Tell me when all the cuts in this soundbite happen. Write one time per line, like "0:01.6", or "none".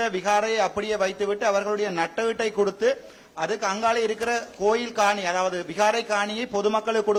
none